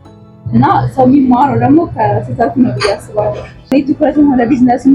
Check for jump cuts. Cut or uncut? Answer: cut